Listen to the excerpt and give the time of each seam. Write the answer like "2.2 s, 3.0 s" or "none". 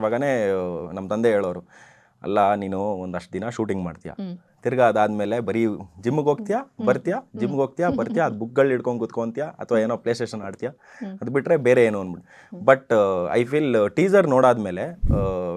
none